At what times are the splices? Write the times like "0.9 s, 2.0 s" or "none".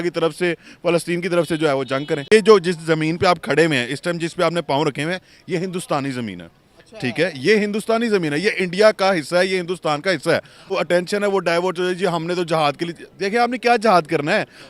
2.3 s, 10.7 s